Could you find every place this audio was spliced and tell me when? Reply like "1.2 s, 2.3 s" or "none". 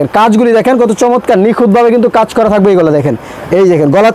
none

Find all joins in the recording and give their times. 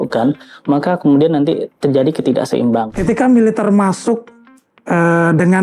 2.9 s

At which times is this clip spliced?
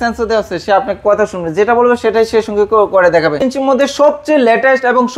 3.4 s

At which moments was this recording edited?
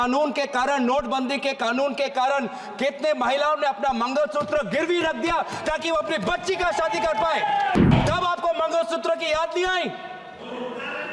7.8 s

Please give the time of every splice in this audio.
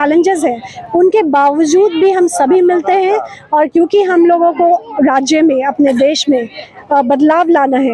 none

